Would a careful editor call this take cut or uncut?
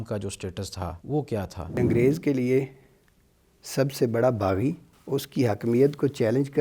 cut